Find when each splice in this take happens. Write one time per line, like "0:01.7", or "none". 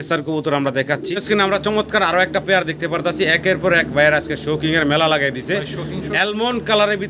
0:01.2